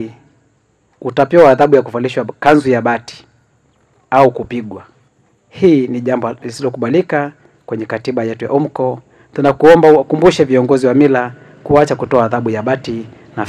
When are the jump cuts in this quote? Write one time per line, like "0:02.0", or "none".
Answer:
none